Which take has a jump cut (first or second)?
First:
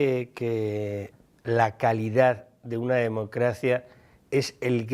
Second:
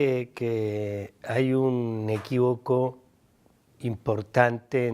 second